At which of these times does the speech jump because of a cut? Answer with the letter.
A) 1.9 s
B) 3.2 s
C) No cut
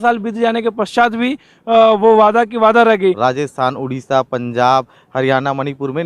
B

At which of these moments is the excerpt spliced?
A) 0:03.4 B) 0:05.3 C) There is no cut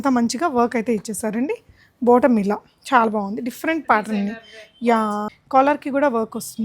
B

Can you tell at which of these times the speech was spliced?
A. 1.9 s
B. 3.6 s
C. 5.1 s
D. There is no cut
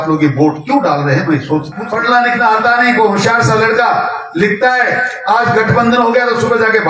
A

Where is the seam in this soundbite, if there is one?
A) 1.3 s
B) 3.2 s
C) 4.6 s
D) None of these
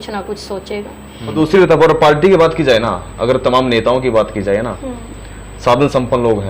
A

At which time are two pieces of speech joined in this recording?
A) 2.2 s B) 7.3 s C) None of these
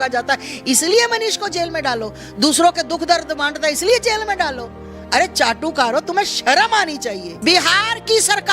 B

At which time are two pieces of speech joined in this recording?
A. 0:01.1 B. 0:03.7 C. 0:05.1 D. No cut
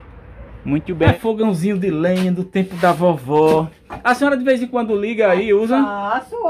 A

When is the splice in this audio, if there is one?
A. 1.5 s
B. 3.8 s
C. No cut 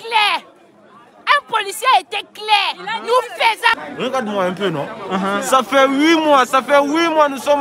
B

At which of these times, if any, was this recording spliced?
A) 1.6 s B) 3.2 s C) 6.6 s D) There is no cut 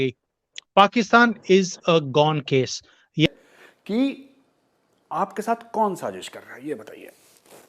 B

